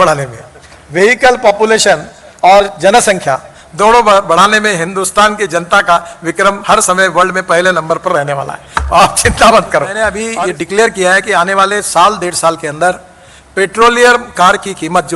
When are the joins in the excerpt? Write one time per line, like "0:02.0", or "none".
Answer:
0:10.3